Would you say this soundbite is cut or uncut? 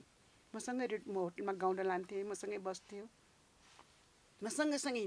uncut